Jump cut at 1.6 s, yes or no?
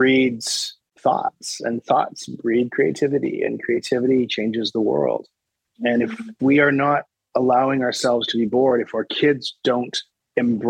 no